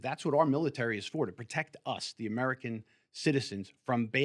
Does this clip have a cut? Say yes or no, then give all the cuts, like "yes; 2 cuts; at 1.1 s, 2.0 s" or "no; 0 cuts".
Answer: no; 0 cuts